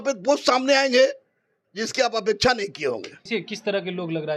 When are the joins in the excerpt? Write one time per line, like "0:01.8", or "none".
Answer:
0:03.1